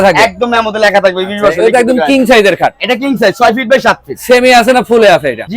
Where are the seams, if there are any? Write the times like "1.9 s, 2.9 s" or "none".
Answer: none